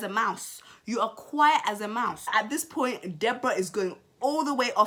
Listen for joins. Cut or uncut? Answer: uncut